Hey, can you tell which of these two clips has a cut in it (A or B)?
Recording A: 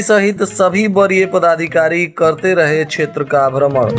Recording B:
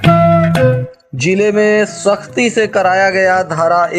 B